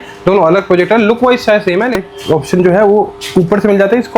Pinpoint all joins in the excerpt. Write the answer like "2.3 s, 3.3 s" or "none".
2.0 s